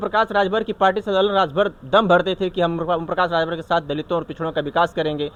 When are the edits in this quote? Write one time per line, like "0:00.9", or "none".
none